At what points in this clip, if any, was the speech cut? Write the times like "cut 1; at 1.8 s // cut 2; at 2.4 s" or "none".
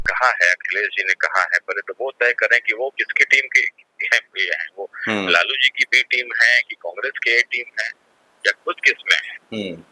none